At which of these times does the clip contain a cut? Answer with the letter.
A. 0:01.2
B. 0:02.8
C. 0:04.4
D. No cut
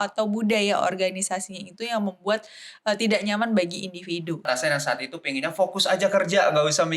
C